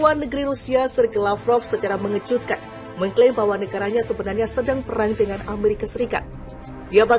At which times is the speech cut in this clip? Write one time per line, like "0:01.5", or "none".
none

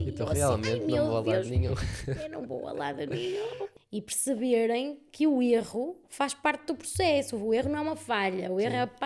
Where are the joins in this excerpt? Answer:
0:03.7

